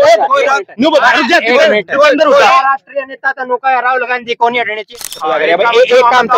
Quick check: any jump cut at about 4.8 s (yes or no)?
yes